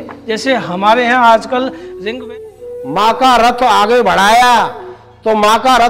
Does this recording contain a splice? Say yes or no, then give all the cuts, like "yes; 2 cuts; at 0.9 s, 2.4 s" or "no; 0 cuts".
yes; 1 cut; at 2.3 s